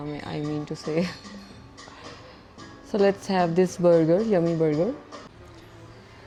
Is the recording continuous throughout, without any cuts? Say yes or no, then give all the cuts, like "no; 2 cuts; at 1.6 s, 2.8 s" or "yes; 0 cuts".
yes; 0 cuts